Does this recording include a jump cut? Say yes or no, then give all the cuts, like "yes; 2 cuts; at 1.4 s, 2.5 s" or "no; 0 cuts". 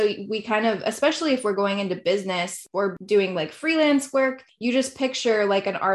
yes; 2 cuts; at 2.6 s, 4.5 s